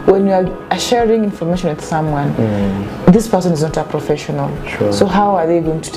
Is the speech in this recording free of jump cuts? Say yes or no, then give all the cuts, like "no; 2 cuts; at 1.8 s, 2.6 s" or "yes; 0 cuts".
yes; 0 cuts